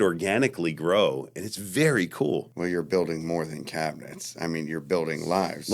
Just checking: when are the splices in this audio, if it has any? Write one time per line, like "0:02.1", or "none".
0:02.5

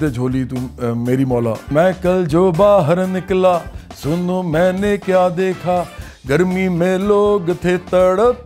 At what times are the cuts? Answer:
0:01.7

